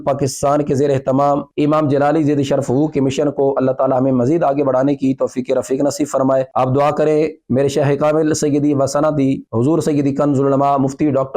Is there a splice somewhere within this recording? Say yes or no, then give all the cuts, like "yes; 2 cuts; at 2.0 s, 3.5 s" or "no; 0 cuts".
yes; 1 cut; at 1.5 s